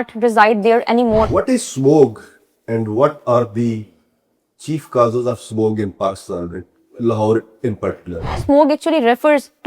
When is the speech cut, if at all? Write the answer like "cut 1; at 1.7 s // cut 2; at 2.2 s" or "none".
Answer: cut 1; at 1.3 s // cut 2; at 8.4 s